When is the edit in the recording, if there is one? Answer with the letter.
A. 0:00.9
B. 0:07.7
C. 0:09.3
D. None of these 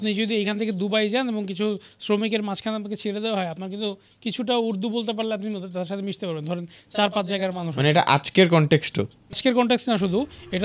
C